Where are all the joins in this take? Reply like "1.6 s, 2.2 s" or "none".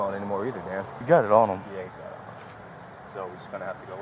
1.0 s, 2.6 s